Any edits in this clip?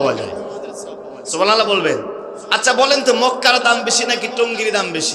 no; 0 cuts

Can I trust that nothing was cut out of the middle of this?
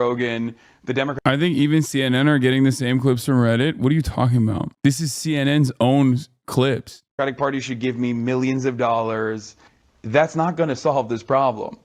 yes; 0 cuts

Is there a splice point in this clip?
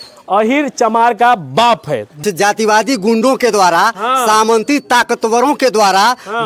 yes; 1 cut; at 2.2 s

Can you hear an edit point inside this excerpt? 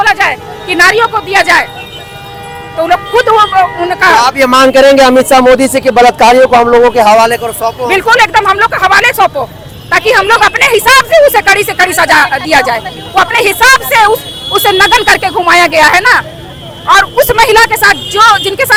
no; 0 cuts

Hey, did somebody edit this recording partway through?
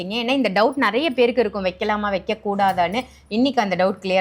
no; 0 cuts

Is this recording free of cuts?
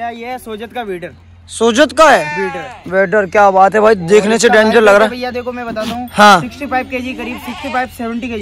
yes; 0 cuts

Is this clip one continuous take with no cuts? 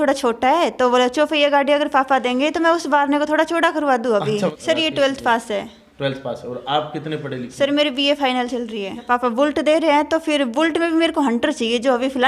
no; 2 cuts; at 4.6 s, 9.1 s

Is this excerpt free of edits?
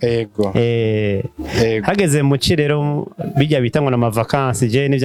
yes; 0 cuts

